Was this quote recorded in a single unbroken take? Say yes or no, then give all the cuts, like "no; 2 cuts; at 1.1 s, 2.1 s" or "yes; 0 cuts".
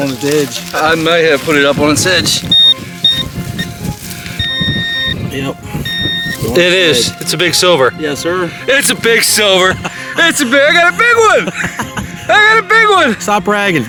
yes; 0 cuts